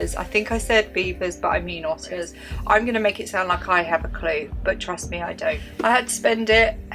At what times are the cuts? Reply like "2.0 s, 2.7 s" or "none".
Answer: 2.3 s, 5.7 s